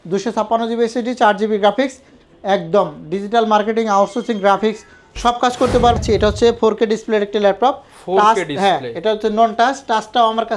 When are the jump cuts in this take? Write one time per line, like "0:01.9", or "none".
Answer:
0:06.0